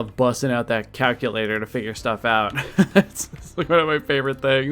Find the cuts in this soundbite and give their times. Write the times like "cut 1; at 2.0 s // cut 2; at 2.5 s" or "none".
none